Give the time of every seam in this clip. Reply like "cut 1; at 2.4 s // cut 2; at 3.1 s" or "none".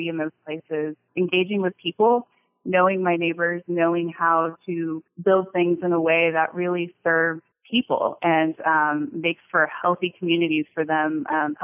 cut 1; at 1.0 s // cut 2; at 5.1 s // cut 3; at 7.5 s